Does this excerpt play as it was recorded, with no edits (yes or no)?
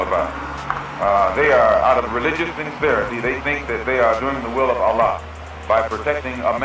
yes